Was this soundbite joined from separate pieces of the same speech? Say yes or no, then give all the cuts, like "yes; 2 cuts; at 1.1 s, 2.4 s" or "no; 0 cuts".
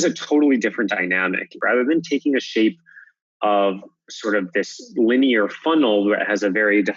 yes; 1 cut; at 1.6 s